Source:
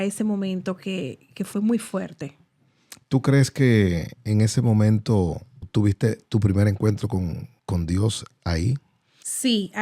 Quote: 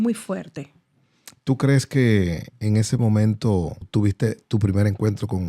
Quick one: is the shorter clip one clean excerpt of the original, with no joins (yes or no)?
no